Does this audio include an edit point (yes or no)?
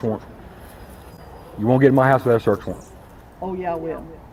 no